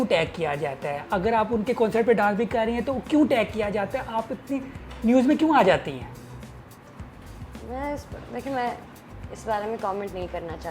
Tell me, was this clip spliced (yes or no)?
no